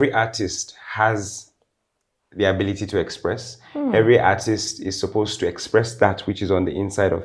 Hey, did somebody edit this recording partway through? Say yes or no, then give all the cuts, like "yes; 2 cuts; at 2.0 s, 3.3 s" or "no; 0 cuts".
no; 0 cuts